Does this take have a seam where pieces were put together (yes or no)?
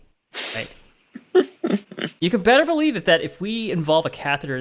no